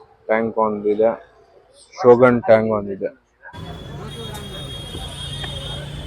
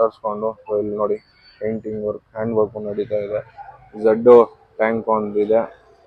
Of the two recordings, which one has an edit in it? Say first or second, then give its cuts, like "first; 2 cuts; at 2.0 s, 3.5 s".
first; 1 cut; at 3.5 s